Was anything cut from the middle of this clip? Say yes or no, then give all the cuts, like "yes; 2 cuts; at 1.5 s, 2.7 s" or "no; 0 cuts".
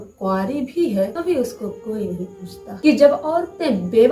yes; 2 cuts; at 1.2 s, 2.7 s